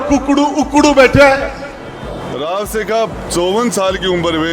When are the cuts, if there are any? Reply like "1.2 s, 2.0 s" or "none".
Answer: 2.1 s

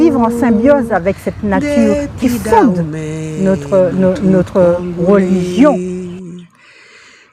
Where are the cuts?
5.8 s

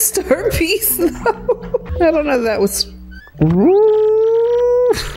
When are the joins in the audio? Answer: 1.9 s

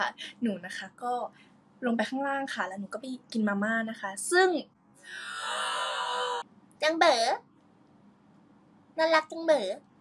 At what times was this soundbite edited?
6.4 s

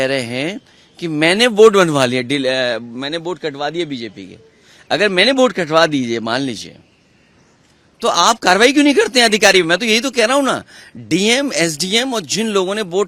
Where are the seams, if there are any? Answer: none

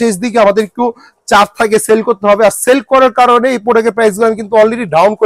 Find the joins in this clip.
none

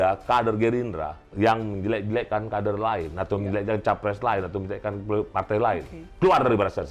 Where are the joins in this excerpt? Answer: 1.2 s, 6.0 s

